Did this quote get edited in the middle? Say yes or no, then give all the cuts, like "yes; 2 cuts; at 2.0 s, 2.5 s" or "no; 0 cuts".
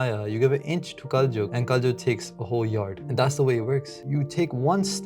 yes; 3 cuts; at 1.6 s, 3.0 s, 4.0 s